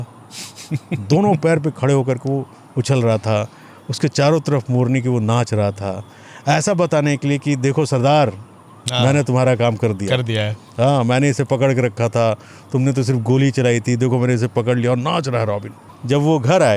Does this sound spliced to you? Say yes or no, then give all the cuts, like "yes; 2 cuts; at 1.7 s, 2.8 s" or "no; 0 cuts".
no; 0 cuts